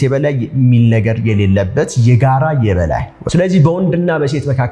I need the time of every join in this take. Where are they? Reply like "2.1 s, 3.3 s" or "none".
3.2 s